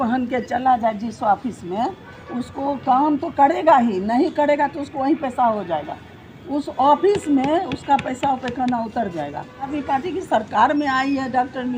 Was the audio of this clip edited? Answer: yes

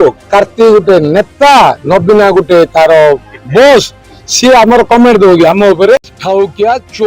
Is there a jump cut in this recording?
yes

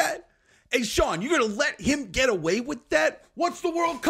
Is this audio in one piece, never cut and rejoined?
yes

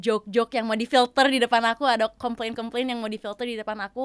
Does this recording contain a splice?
no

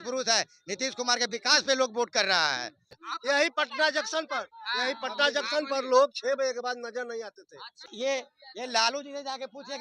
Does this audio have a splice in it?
yes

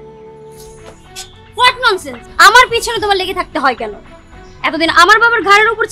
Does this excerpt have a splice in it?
no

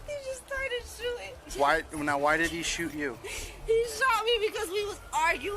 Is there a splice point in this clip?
yes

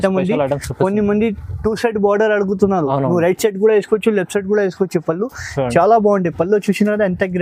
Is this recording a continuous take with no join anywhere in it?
yes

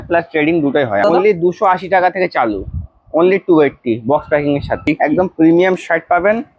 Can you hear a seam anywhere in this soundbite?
yes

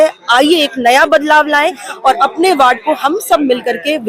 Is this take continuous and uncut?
yes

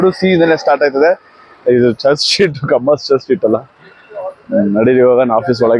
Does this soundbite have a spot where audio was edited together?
no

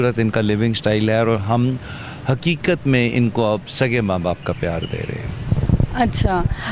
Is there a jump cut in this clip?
no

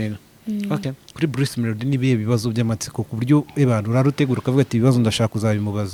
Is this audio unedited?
yes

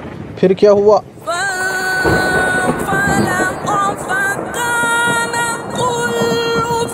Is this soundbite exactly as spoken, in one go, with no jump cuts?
yes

